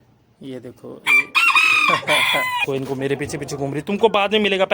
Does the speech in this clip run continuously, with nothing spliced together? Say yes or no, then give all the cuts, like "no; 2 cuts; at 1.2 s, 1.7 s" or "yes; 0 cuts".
no; 1 cut; at 2.6 s